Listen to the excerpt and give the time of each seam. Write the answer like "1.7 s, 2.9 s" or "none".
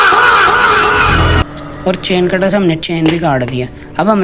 1.5 s